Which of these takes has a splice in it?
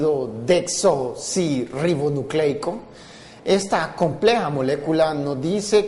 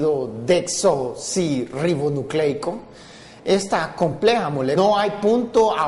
first; 1 cut; at 4.7 s

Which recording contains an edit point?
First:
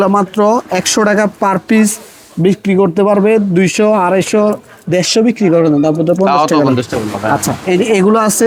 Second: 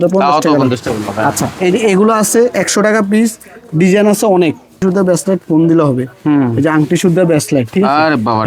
second; 1 cut; at 4.8 s

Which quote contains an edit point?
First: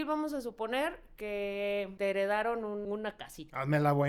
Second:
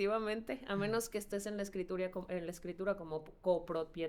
first; 2 cuts; at 1.9 s, 2.8 s

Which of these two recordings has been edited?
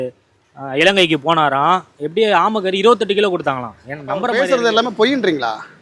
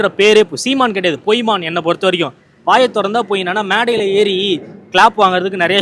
first; 1 cut; at 4.3 s

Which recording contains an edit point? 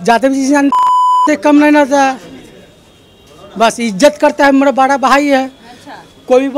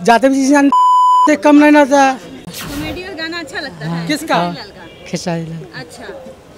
second; 1 cut; at 2.6 s

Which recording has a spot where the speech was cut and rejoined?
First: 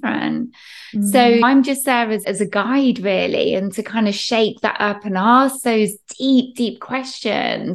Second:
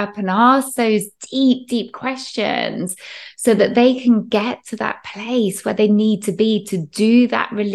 first; 1 cut; at 2.2 s

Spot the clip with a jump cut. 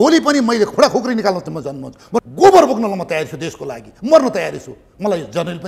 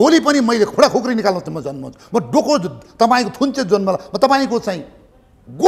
first; 1 cut; at 2.3 s

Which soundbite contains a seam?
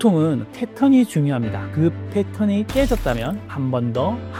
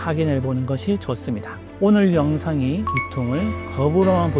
second; 1 cut; at 1.6 s

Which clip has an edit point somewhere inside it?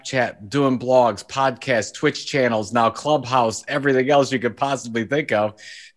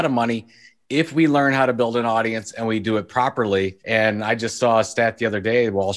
second; 1 cut; at 3.8 s

